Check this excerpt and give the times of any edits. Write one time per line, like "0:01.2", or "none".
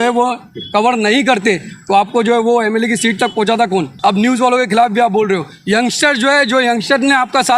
0:03.9

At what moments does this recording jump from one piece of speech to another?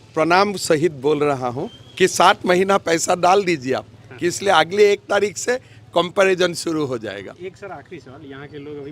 none

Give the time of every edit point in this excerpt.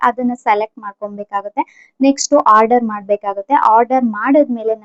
none

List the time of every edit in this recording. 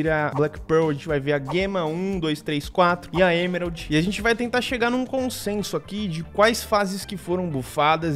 0:03.8

